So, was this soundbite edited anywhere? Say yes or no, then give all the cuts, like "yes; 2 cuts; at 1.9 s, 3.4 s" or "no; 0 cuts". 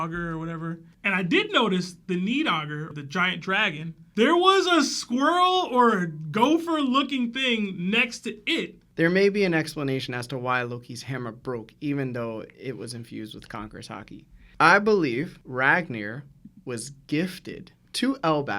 yes; 2 cuts; at 2.9 s, 8.8 s